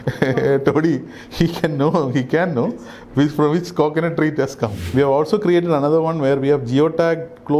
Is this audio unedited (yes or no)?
no